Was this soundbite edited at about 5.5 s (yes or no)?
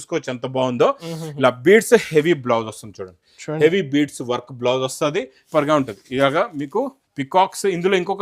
yes